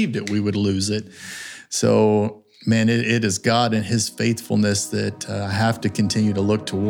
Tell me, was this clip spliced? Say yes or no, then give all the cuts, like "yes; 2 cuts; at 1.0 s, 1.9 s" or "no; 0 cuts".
no; 0 cuts